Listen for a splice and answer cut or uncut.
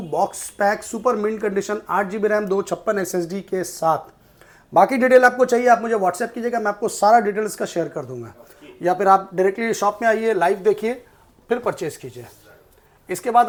uncut